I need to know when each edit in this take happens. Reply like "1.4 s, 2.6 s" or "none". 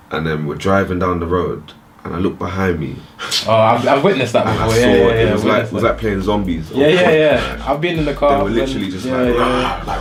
none